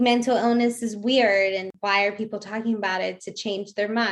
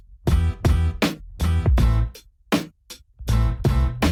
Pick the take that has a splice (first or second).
first